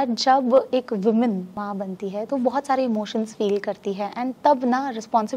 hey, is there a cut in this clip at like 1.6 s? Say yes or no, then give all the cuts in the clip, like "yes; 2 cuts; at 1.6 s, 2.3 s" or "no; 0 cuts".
yes; 1 cut; at 1.6 s